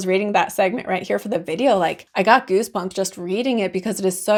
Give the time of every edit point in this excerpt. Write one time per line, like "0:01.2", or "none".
none